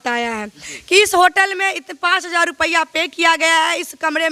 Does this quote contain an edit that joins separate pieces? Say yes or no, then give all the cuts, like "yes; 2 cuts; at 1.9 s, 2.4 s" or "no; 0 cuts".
no; 0 cuts